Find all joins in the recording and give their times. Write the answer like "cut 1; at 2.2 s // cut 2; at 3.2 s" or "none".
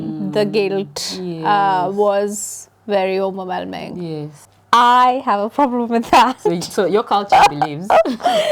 cut 1; at 4.5 s